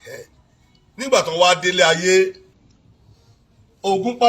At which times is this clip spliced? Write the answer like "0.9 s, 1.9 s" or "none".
2.5 s